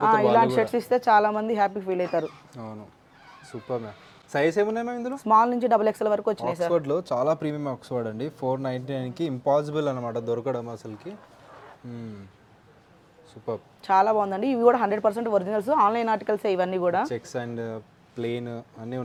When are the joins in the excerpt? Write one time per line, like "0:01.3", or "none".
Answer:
none